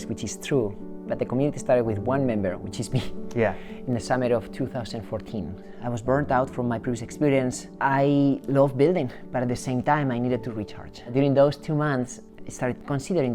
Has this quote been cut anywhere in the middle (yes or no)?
yes